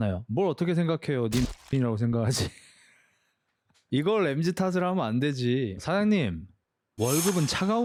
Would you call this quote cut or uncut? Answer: uncut